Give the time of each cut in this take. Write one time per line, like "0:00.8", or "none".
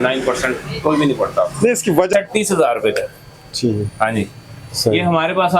0:02.1